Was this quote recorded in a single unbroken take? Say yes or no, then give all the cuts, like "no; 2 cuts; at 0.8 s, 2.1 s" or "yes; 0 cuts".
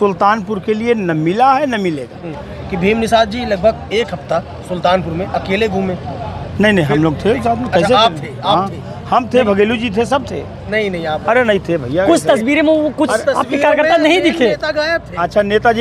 yes; 0 cuts